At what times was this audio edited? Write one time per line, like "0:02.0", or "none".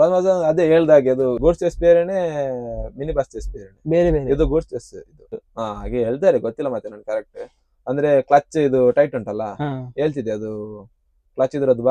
0:01.4
0:05.5